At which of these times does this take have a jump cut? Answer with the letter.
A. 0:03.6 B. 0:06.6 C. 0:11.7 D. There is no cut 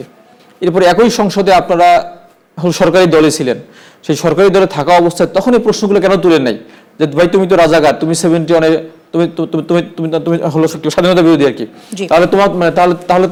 D